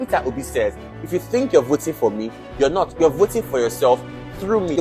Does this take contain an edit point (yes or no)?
yes